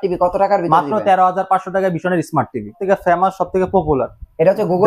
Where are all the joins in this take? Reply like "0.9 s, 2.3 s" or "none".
2.8 s